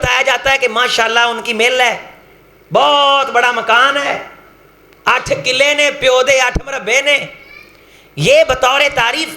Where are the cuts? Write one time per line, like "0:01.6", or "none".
none